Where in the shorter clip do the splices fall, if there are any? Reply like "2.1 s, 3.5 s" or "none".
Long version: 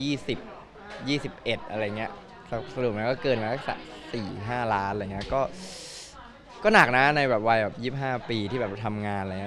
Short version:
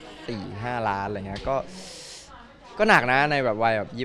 none